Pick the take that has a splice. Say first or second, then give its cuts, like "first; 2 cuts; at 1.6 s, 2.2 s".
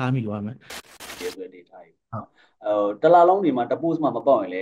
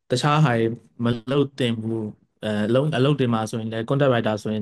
first; 1 cut; at 1.1 s